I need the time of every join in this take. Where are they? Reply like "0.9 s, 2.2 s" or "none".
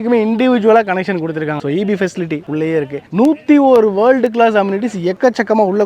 1.6 s, 3.1 s